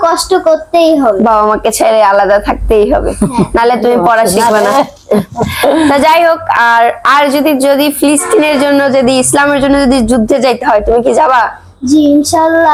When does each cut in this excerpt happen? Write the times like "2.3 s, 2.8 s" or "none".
none